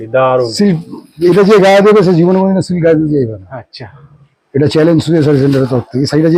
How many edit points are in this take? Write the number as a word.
zero